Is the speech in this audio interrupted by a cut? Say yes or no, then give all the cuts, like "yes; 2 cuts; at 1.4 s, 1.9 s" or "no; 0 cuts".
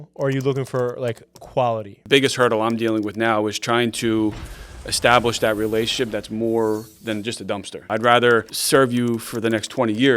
yes; 3 cuts; at 2.0 s, 7.8 s, 8.6 s